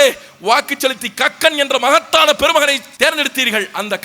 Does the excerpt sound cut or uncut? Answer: cut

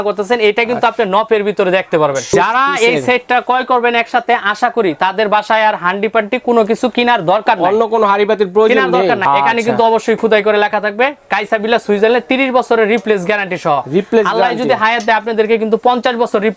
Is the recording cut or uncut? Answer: cut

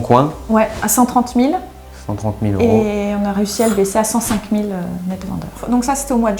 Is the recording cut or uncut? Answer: uncut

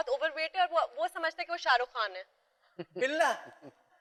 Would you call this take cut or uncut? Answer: uncut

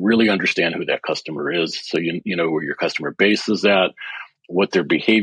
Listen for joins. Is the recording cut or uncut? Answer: uncut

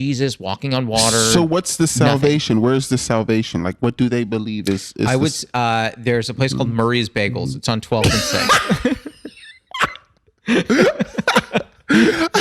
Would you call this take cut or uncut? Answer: uncut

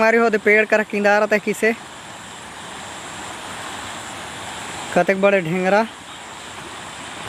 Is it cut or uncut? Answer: uncut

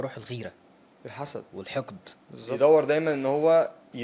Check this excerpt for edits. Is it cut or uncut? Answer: cut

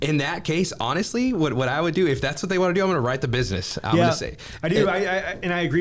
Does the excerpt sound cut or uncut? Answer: uncut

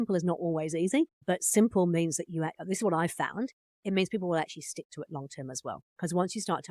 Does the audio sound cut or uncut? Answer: cut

